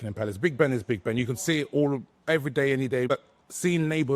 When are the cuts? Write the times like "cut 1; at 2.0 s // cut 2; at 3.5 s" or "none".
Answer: cut 1; at 3.1 s